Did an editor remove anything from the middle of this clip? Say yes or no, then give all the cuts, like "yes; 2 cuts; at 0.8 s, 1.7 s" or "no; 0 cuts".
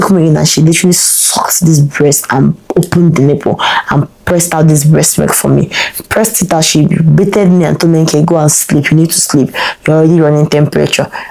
no; 0 cuts